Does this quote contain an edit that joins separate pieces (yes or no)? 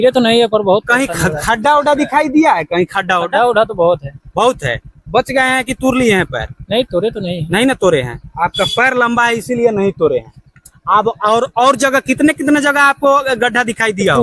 no